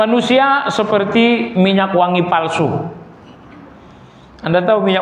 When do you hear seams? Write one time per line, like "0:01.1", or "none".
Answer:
none